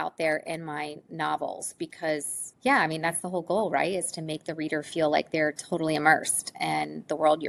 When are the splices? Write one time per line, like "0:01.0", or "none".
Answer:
none